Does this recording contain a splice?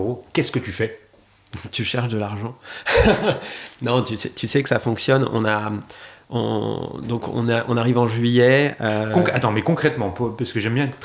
no; 0 cuts

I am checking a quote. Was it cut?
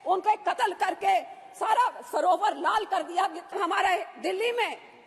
yes; 1 cut; at 3.6 s

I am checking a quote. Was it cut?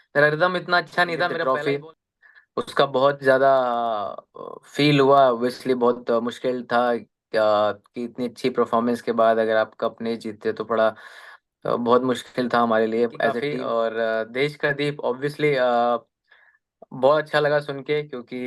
yes; 2 cuts; at 1.4 s, 13.5 s

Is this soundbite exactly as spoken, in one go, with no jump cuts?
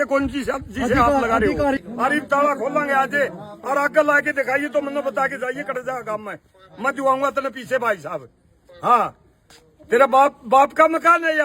no; 1 cut; at 1.8 s

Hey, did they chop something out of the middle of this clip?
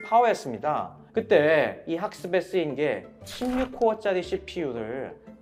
no; 0 cuts

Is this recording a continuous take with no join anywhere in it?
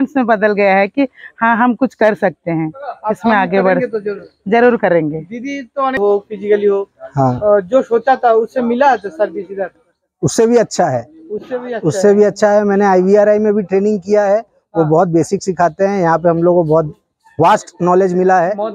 no; 1 cut; at 6.0 s

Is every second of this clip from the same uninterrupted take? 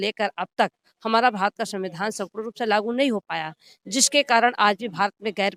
yes; 0 cuts

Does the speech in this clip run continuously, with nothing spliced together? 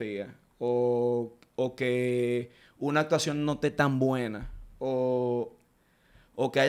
yes; 0 cuts

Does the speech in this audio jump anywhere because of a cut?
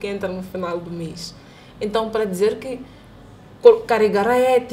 no; 0 cuts

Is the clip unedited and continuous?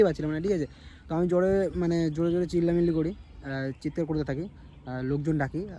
yes; 0 cuts

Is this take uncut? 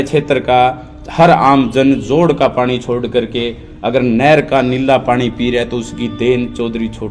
yes; 0 cuts

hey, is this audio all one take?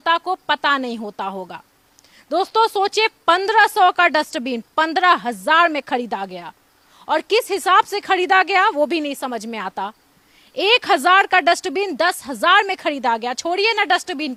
yes; 0 cuts

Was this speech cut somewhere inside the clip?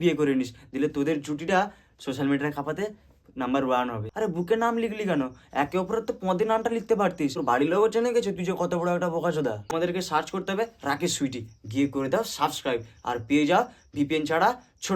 yes; 3 cuts; at 4.1 s, 7.4 s, 9.7 s

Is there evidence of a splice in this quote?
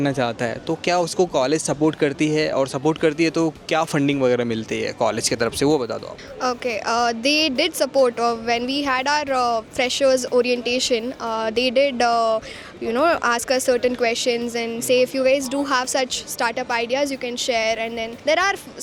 no; 0 cuts

